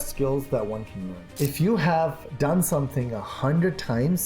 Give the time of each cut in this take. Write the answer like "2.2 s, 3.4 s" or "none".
1.2 s, 2.2 s